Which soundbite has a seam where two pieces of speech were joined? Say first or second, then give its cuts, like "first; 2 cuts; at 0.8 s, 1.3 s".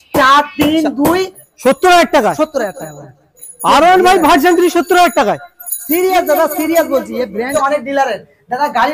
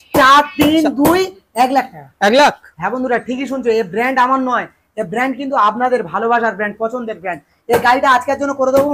first; 2 cuts; at 1.4 s, 7.5 s